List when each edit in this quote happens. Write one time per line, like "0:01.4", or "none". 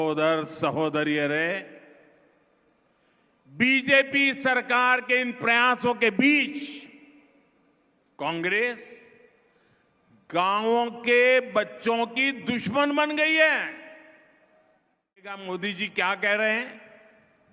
0:15.4